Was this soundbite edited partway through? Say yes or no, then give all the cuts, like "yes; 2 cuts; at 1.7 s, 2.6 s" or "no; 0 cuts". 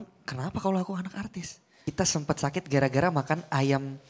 yes; 1 cut; at 1.7 s